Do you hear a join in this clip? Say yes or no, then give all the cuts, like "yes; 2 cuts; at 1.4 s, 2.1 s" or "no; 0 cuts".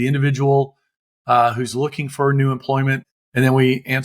yes; 1 cut; at 3.1 s